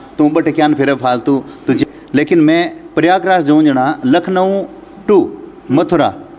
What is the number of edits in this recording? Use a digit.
1